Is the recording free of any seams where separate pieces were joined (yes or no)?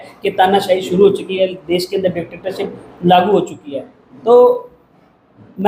yes